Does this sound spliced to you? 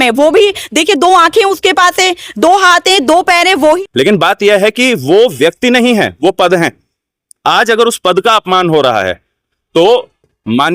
yes; 1 cut; at 3.8 s

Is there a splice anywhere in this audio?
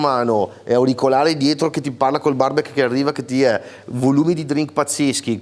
no; 0 cuts

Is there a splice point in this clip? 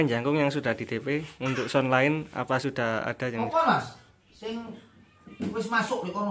no; 0 cuts

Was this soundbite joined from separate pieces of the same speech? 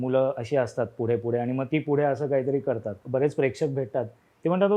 yes; 1 cut; at 2.9 s

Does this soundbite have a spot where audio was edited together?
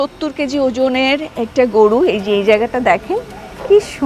no; 0 cuts

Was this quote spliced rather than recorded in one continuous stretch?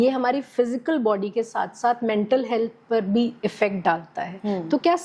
no; 0 cuts

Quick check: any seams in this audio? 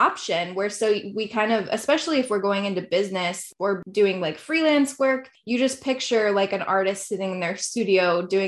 yes; 2 cuts; at 3.5 s, 5.3 s

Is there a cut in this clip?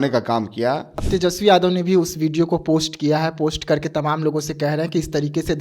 yes; 1 cut; at 0.9 s

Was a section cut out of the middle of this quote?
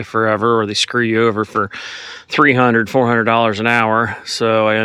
no; 0 cuts

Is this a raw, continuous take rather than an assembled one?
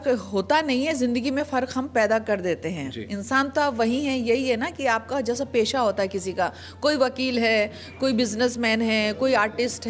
yes; 0 cuts

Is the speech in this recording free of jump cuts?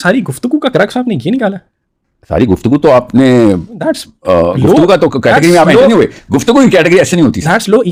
yes; 0 cuts

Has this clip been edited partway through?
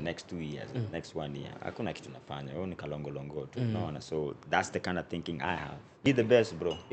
yes; 1 cut; at 6.0 s

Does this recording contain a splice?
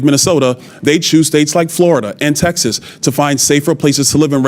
no; 0 cuts

